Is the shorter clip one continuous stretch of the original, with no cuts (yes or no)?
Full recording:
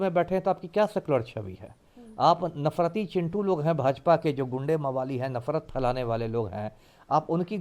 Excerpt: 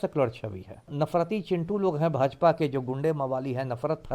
no